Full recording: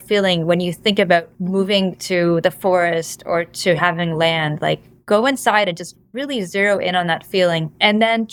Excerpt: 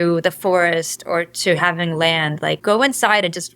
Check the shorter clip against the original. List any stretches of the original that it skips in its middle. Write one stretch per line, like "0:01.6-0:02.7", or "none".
0:04.8-0:05.0

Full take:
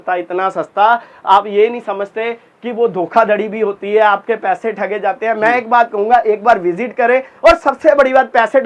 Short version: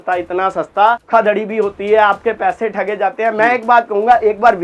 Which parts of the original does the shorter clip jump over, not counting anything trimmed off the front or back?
0:01.1-0:03.1

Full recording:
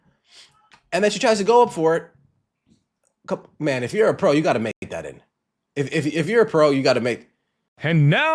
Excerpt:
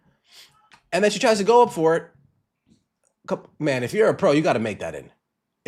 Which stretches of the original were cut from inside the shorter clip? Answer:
0:04.8-0:04.9

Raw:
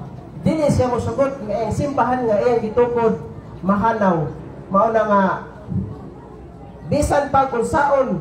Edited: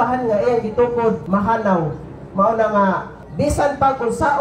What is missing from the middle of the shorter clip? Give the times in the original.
0:03.2-0:03.6
0:05.5-0:06.7

